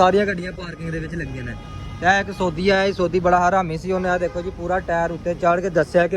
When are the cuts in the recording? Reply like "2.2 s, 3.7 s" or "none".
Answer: none